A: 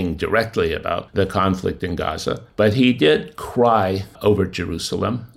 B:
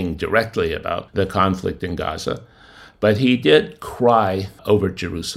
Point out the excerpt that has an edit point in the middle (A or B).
A